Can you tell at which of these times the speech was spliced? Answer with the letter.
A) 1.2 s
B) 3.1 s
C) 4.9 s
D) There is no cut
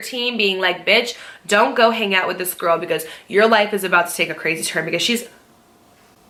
D